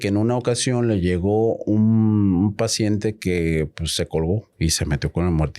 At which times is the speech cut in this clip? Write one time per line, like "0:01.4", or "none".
0:04.5